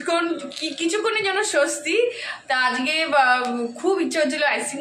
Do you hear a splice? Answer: no; 0 cuts

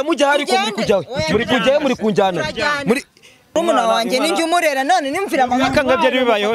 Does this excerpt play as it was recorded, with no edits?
no; 1 cut; at 3.5 s

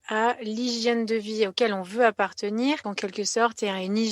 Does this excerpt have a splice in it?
yes; 1 cut; at 2.9 s

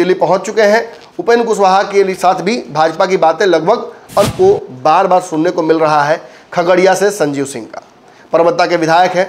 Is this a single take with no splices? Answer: no; 1 cut; at 4.3 s

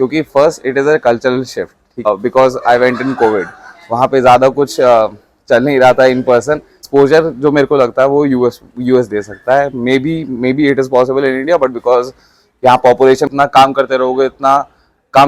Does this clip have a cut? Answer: yes; 3 cuts; at 2.1 s, 6.8 s, 13.2 s

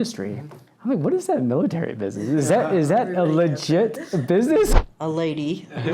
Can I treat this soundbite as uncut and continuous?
no; 1 cut; at 4.7 s

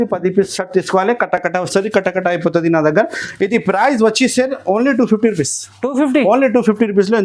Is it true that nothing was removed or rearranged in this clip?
yes; 0 cuts

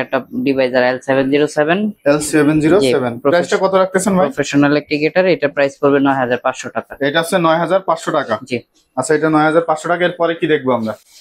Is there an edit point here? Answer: no; 0 cuts

